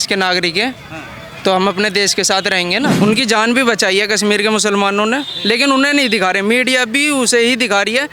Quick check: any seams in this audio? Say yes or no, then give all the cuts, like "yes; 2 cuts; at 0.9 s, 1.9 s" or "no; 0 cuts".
yes; 1 cut; at 2.9 s